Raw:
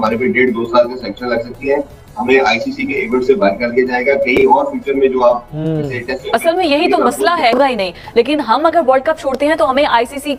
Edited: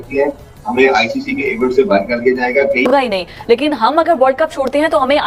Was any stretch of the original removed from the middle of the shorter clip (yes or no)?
yes